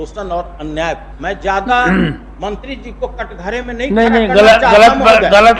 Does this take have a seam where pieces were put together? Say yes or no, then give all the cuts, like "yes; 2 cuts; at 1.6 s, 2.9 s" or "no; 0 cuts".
yes; 1 cut; at 1.1 s